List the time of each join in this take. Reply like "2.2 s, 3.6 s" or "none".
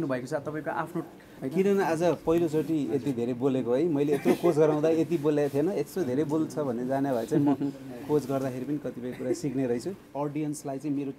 1.4 s, 10.0 s